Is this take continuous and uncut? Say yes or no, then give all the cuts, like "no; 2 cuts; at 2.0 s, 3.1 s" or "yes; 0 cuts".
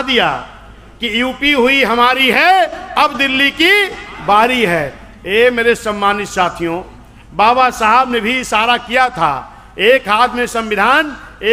yes; 0 cuts